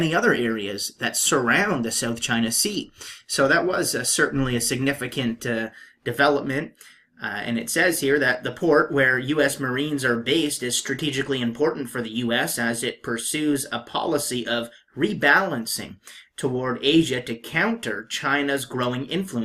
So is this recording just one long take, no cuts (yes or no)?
no